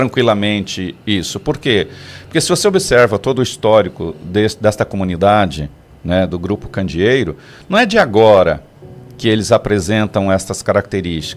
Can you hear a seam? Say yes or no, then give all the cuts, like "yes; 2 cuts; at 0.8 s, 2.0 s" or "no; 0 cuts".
no; 0 cuts